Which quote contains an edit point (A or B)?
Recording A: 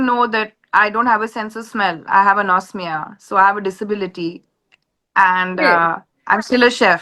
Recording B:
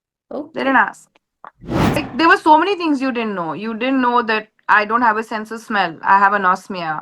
B